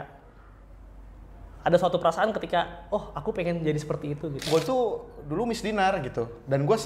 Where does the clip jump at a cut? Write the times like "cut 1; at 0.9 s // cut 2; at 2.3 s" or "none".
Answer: cut 1; at 4.5 s